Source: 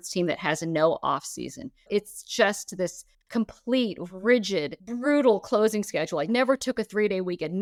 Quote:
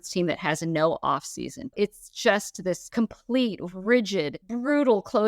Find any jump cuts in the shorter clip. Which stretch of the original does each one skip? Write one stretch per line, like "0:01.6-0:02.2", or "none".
0:01.6-0:01.7
0:03.0-0:03.2